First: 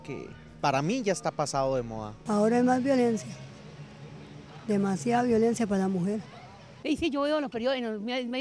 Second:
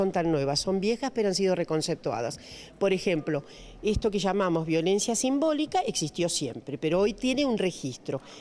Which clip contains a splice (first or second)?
first